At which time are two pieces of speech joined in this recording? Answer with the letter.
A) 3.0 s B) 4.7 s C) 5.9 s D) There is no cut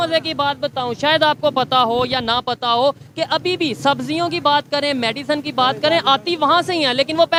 D